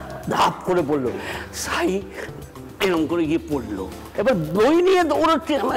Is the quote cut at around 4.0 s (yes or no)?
yes